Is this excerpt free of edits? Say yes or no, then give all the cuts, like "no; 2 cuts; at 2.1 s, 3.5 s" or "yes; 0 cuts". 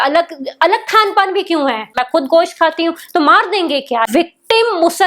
no; 2 cuts; at 2.0 s, 4.1 s